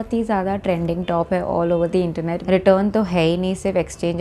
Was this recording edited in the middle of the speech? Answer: yes; 1 cut; at 2.3 s

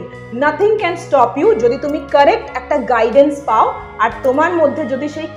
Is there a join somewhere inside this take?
no; 0 cuts

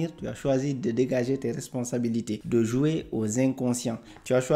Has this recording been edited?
yes; 1 cut; at 2.4 s

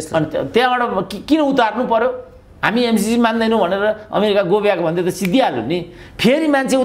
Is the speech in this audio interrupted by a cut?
no; 0 cuts

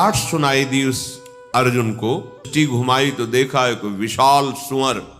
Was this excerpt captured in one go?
no; 1 cut; at 2.5 s

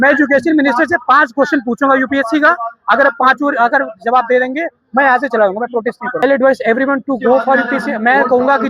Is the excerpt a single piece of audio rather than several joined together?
no; 1 cut; at 6.2 s

